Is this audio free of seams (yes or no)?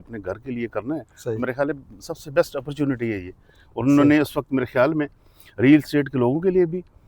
yes